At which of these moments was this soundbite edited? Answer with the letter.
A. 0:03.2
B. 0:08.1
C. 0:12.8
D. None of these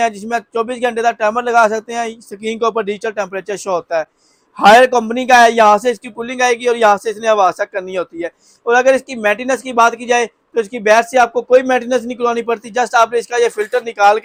D